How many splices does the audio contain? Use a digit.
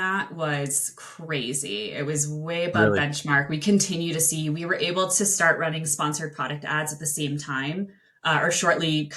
0